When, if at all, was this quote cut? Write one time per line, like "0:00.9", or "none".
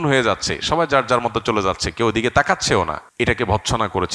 0:03.0